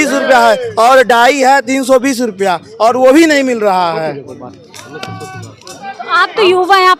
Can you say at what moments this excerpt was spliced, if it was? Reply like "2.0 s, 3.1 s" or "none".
none